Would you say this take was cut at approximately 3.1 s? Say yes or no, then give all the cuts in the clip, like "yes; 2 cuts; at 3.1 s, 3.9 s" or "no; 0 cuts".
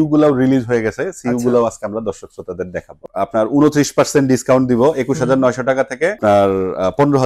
yes; 2 cuts; at 3.1 s, 6.2 s